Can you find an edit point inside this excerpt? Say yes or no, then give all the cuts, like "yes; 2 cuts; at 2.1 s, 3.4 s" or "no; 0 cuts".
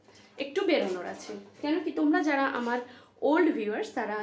no; 0 cuts